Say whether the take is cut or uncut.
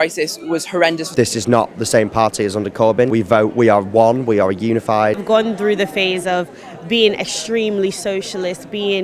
cut